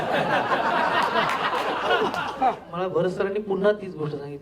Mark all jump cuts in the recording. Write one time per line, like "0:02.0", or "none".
0:02.7